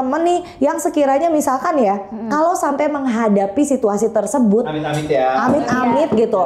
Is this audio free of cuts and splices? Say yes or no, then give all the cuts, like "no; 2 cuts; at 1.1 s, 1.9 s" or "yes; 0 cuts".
yes; 0 cuts